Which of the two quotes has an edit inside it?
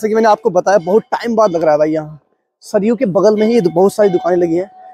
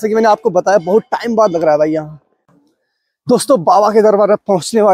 second; 1 cut; at 2.5 s

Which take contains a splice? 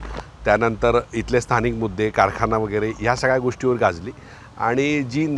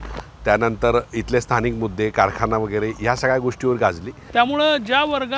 second; 1 cut; at 4.1 s

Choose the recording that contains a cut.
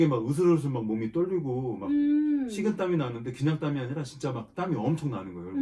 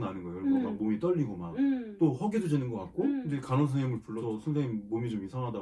second; 3 cuts; at 1.9 s, 3.2 s, 4.1 s

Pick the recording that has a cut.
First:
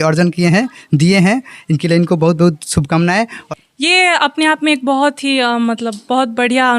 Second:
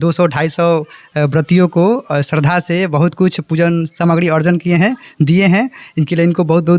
first; 1 cut; at 3.4 s

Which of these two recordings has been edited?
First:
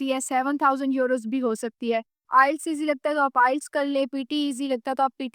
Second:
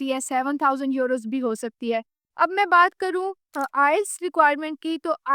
first; 1 cut; at 2.2 s

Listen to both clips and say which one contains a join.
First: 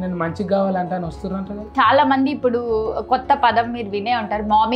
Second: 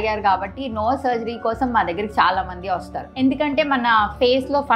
second; 1 cut; at 3.1 s

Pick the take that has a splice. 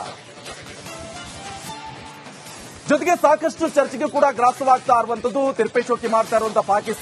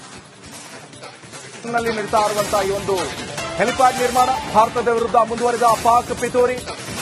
second; 1 cut; at 1.7 s

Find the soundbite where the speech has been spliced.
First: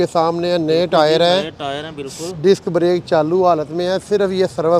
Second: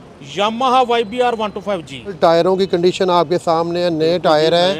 second; 1 cut; at 2.2 s

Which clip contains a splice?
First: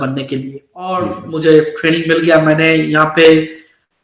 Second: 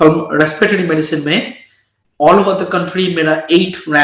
first; 1 cut; at 1.1 s

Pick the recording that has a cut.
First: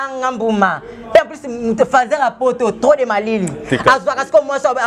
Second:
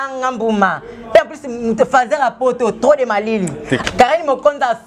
second; 1 cut; at 3.8 s

